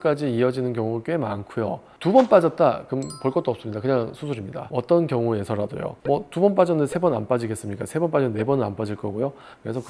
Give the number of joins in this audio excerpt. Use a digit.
2